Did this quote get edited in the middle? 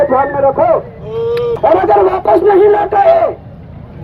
yes; 1 cut; at 1.6 s

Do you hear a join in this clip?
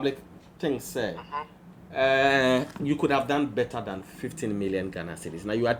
no; 0 cuts

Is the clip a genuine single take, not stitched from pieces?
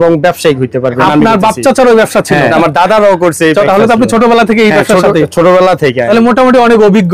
no; 4 cuts; at 1.0 s, 2.5 s, 3.7 s, 6.0 s

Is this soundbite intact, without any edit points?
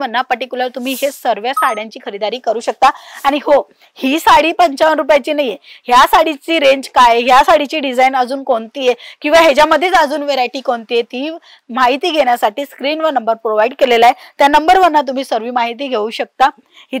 yes; 0 cuts

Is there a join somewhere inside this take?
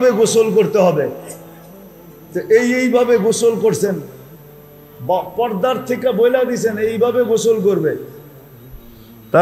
no; 0 cuts

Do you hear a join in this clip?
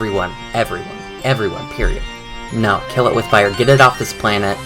yes; 1 cut; at 2.0 s

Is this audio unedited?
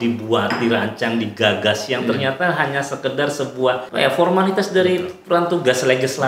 no; 1 cut; at 3.9 s

